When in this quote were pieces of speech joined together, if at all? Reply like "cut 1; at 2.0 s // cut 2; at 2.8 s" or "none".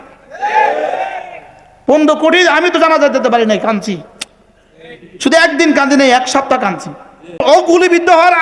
cut 1; at 7.4 s